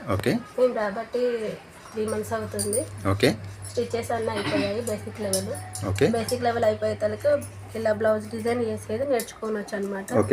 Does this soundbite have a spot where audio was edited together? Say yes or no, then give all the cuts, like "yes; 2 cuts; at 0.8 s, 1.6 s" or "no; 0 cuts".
no; 0 cuts